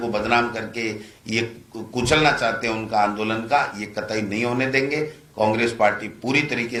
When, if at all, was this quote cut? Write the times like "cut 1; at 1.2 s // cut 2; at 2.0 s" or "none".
none